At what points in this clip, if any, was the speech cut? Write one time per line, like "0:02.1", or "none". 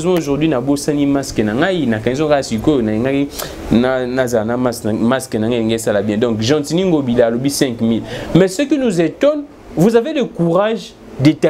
none